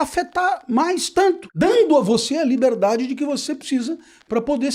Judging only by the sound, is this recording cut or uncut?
cut